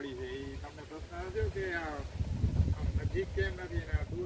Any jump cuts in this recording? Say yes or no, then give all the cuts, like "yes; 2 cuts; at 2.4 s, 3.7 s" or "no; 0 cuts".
no; 0 cuts